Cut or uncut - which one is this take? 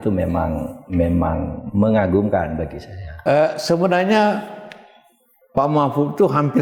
cut